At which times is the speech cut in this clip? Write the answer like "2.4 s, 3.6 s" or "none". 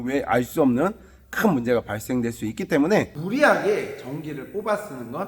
3.2 s